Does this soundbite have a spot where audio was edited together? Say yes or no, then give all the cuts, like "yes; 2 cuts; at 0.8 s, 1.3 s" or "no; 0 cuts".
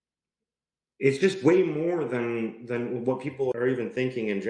yes; 1 cut; at 3.5 s